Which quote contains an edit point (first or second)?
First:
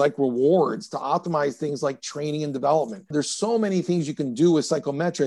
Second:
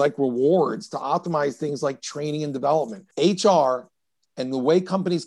second